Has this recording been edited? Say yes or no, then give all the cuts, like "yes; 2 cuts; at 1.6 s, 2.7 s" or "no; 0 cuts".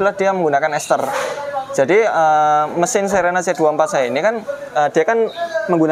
no; 0 cuts